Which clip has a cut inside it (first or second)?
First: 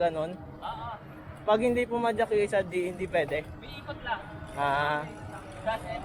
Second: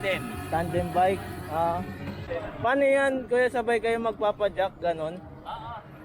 second